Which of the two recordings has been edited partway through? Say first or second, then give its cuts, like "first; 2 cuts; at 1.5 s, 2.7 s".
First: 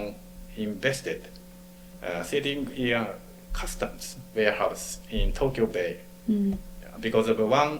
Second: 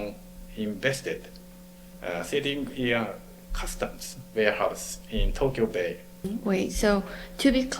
second; 1 cut; at 6.2 s